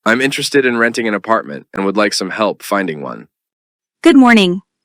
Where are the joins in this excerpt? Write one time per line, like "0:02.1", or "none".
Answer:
0:01.3

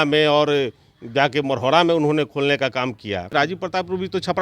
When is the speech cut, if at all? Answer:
0:03.3

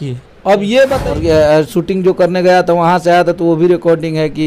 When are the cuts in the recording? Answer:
0:01.0

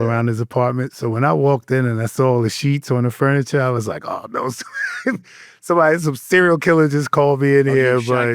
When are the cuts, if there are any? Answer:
none

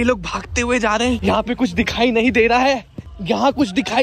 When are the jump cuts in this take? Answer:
none

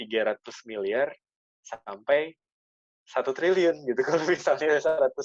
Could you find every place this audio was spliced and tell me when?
none

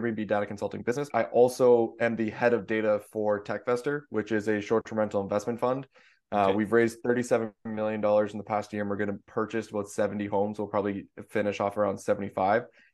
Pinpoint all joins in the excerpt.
0:01.1
0:09.2

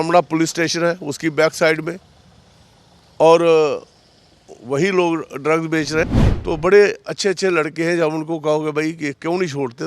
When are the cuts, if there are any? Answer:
0:06.0

